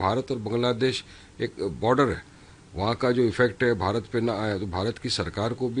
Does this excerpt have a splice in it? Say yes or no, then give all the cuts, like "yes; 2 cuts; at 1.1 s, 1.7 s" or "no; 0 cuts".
no; 0 cuts